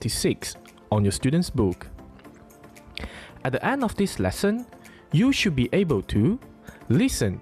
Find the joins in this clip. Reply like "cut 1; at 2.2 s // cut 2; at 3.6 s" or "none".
cut 1; at 1.0 s